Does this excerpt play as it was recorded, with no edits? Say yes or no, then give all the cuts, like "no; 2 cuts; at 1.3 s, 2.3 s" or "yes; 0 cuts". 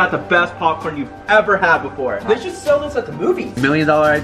no; 1 cut; at 2.2 s